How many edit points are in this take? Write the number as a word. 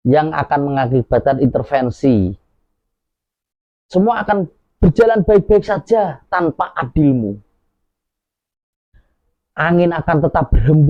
zero